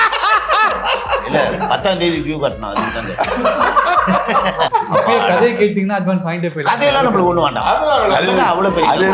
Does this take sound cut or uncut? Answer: cut